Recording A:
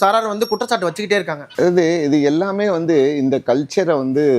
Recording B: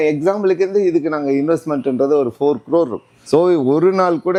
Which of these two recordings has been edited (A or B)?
A